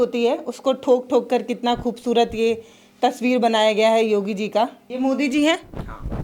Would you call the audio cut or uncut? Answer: cut